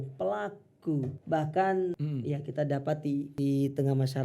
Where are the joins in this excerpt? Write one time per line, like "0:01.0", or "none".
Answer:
0:01.2
0:02.0
0:03.3